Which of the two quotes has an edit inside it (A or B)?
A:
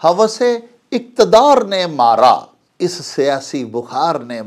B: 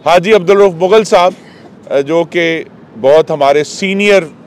A